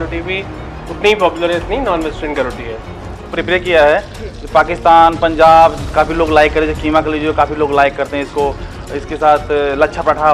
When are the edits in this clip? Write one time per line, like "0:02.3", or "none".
0:03.3